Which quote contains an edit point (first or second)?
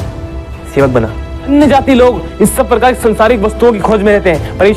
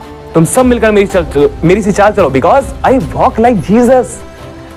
first